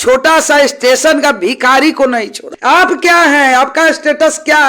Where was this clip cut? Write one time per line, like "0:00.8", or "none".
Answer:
0:02.4